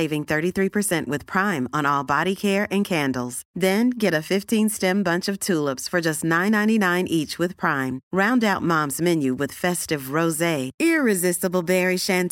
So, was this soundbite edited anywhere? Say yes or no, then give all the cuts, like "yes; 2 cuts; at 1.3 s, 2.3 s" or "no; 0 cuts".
no; 0 cuts